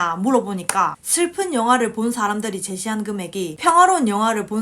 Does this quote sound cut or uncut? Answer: cut